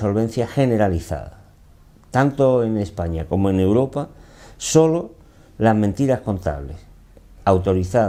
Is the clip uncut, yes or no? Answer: yes